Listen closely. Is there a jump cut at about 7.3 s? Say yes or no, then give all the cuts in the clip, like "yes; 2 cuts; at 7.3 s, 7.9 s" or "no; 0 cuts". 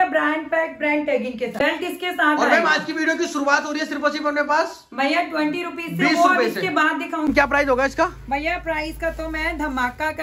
yes; 2 cuts; at 1.5 s, 7.3 s